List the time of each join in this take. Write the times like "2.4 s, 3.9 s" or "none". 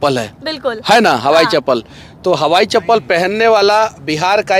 none